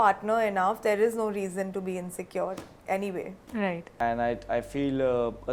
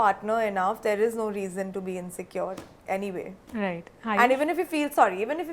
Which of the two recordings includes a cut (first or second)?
first